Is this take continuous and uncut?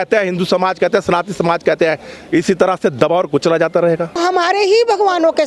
no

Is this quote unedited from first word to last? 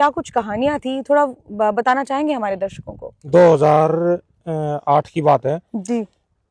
no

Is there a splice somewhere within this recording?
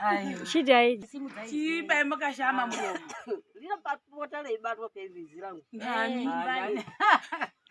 yes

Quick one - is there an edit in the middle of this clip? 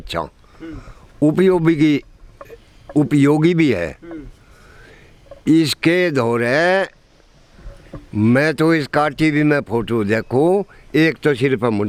no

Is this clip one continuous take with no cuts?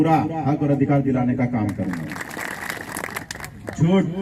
no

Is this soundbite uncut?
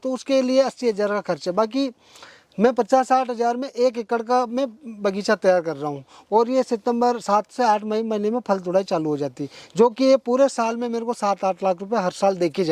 yes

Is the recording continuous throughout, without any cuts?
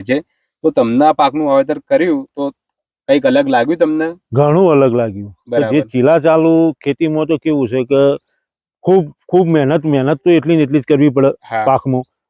yes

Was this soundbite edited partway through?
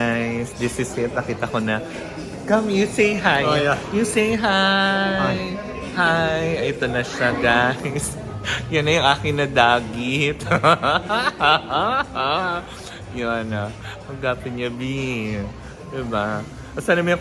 no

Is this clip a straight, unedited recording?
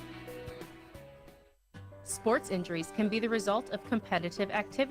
no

